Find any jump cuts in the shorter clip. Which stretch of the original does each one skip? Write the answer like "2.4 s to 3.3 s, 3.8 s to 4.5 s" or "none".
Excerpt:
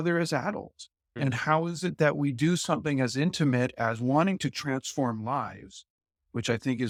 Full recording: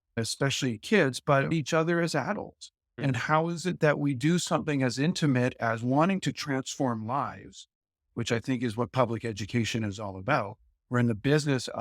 none